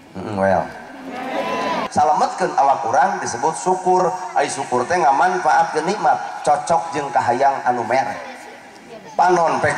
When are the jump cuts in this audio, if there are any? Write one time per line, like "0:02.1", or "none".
0:01.8